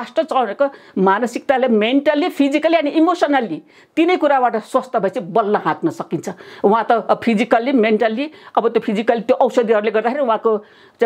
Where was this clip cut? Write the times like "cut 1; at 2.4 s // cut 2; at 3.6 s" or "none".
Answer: none

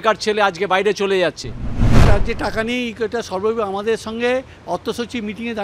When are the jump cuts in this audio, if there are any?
cut 1; at 2.0 s

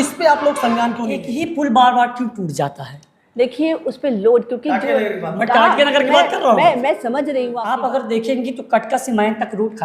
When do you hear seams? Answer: cut 1; at 1.3 s // cut 2; at 7.6 s

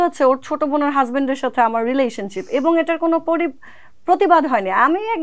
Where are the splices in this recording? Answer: none

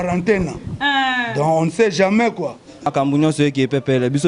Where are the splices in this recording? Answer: cut 1; at 2.9 s

